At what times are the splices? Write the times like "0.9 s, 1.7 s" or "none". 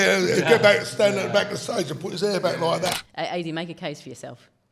3.0 s

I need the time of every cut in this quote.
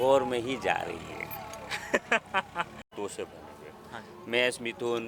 2.9 s

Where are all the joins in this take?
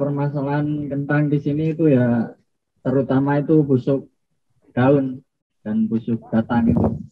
none

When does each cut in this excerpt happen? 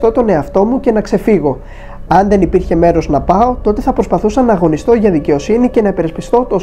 none

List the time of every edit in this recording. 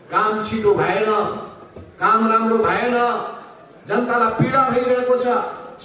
none

